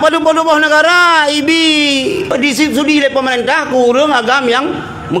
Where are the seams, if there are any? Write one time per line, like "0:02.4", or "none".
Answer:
0:02.3